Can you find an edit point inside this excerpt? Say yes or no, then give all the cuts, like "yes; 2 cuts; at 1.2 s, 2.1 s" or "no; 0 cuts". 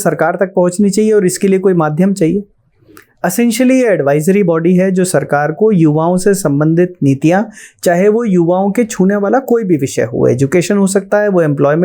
no; 0 cuts